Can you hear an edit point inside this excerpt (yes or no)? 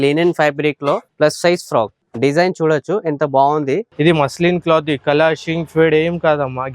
yes